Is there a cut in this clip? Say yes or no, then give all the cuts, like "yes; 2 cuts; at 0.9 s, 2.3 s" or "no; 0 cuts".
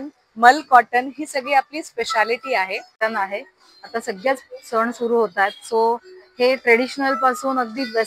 yes; 1 cut; at 3.0 s